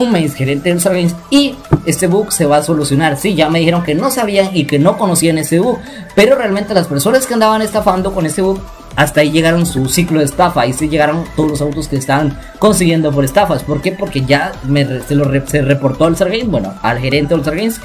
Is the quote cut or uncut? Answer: uncut